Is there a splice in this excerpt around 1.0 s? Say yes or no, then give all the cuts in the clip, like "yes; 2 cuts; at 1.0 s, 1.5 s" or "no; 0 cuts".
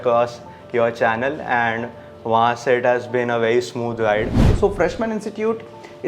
no; 1 cut; at 4.4 s